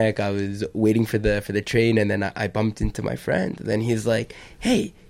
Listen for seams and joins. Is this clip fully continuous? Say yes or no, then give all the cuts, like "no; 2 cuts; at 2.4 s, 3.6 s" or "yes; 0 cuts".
yes; 0 cuts